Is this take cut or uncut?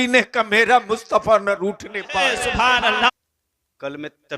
cut